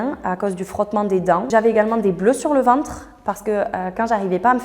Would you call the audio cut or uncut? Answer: uncut